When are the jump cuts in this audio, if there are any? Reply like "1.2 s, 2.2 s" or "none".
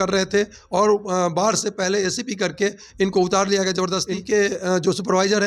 4.1 s